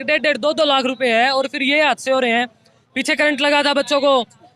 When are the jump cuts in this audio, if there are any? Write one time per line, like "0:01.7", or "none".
none